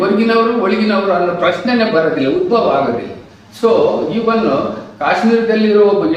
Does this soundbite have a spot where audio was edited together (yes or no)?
no